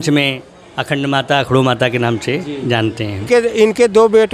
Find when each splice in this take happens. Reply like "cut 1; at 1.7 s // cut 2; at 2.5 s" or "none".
cut 1; at 3.2 s